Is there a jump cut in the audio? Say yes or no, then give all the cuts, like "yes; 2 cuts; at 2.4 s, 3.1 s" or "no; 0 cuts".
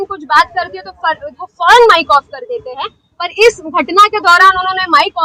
no; 0 cuts